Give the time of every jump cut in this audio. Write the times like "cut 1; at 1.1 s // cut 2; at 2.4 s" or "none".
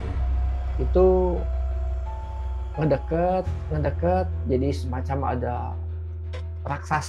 cut 1; at 4.4 s